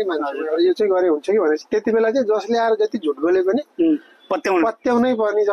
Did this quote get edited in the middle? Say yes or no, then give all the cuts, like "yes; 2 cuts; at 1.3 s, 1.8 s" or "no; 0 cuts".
no; 0 cuts